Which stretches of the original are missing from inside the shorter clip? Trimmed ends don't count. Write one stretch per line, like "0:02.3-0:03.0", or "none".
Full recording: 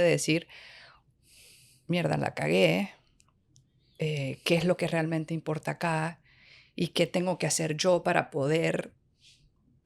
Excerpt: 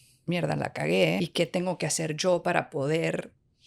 0:02.8-0:06.8